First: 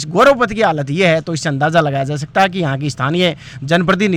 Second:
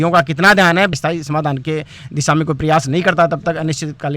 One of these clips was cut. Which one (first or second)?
second